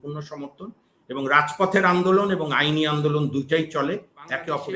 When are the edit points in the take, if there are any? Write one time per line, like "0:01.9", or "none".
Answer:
none